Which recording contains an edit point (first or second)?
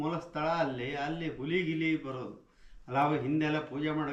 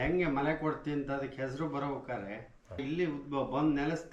second